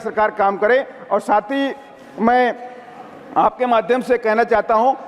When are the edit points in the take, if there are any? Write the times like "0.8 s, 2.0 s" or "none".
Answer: none